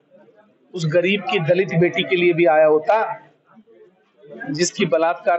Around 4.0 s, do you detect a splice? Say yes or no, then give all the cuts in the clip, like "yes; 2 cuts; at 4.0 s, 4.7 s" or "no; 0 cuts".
no; 0 cuts